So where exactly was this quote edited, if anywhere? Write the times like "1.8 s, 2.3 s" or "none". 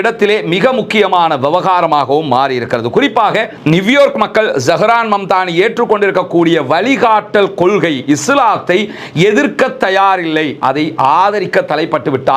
3.6 s